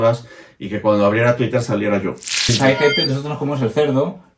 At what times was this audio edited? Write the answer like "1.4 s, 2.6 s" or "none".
2.5 s